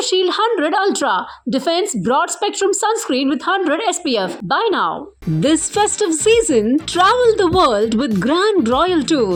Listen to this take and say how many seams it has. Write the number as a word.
zero